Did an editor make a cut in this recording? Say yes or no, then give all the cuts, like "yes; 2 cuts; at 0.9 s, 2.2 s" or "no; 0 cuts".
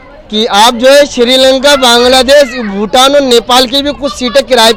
no; 0 cuts